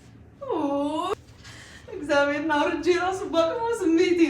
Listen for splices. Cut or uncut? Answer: cut